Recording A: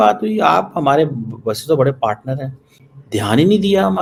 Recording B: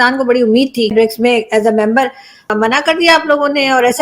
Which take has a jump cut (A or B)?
B